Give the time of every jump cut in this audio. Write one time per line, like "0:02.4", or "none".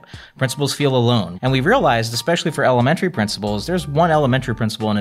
0:01.3